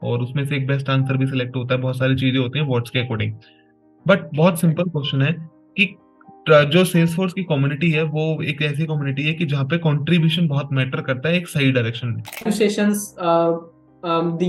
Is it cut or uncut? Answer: cut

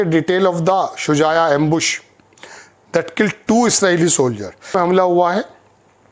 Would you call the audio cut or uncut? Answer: cut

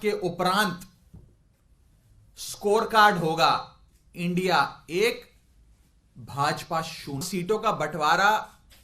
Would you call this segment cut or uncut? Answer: cut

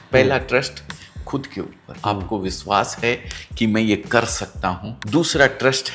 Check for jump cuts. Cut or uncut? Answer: cut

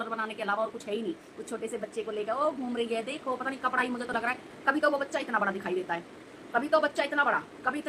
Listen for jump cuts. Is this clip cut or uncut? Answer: uncut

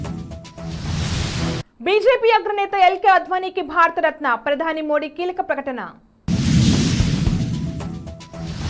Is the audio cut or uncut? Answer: cut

